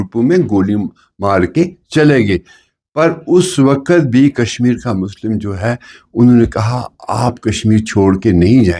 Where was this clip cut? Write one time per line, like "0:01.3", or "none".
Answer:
none